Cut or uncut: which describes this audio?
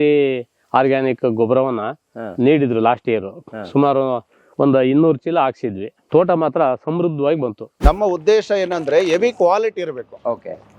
cut